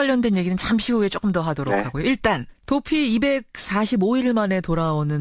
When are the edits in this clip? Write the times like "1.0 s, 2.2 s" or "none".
4.3 s